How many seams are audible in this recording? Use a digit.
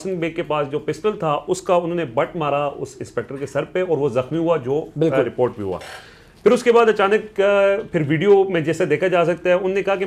0